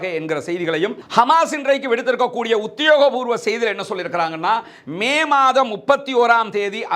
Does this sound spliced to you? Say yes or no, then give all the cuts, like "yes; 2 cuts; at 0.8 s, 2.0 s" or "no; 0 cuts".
yes; 1 cut; at 1.0 s